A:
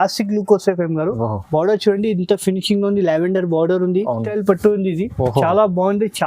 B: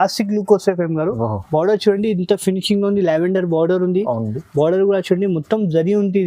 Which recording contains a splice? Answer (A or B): A